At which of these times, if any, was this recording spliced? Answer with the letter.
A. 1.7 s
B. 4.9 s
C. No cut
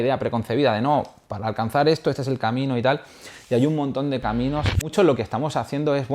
B